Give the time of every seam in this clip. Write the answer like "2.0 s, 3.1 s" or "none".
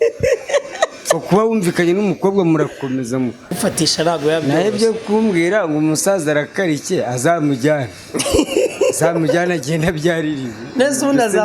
3.5 s